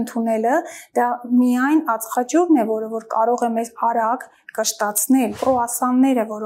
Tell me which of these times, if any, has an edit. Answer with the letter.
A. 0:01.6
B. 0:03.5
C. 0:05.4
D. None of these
C